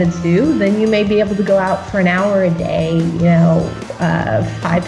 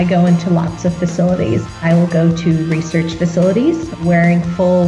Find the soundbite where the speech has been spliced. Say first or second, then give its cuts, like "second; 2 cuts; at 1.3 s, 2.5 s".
second; 2 cuts; at 1.6 s, 4.0 s